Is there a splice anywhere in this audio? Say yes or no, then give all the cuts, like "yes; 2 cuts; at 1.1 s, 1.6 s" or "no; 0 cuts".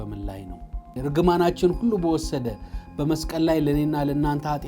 yes; 1 cut; at 0.9 s